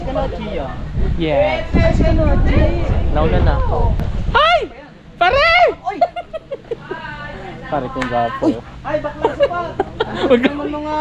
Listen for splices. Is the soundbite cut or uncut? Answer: cut